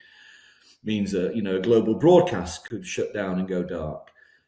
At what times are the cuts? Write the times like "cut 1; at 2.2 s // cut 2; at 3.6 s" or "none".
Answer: cut 1; at 2.7 s